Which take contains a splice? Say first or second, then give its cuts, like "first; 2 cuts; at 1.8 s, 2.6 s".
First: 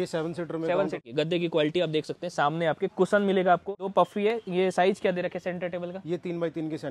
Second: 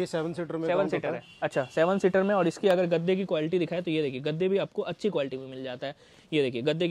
first; 2 cuts; at 1.0 s, 3.8 s